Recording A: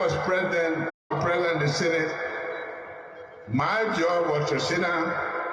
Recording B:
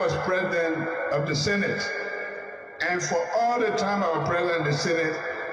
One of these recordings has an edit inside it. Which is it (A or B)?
A